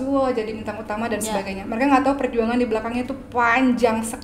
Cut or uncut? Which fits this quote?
uncut